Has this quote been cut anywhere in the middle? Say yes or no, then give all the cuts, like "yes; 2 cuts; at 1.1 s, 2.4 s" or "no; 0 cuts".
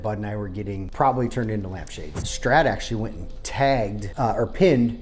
yes; 3 cuts; at 0.9 s, 2.2 s, 4.0 s